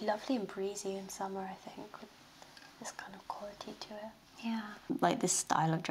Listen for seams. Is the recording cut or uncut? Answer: cut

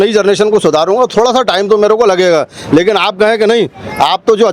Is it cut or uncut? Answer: uncut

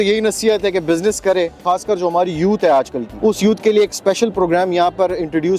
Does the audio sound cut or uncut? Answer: cut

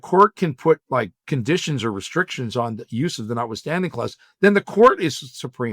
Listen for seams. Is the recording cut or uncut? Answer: cut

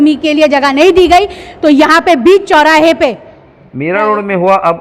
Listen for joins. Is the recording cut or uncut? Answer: cut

